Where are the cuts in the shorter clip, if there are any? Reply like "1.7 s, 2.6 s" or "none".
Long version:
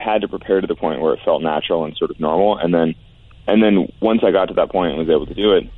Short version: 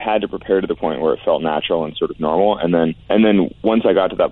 3.0 s